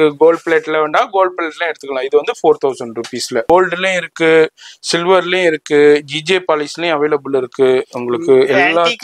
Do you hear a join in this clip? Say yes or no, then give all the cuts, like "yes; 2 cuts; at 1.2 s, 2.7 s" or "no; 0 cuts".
yes; 1 cut; at 3.5 s